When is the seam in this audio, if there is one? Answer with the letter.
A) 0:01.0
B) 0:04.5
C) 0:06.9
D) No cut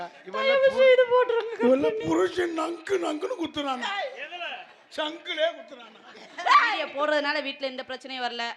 C